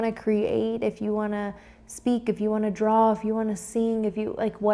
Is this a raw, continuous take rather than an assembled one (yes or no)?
yes